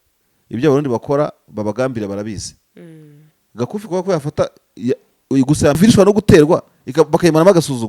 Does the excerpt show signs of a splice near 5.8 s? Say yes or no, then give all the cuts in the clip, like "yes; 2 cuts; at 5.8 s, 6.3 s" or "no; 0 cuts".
yes; 1 cut; at 5.8 s